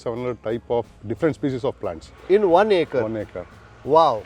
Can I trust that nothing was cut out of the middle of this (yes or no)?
yes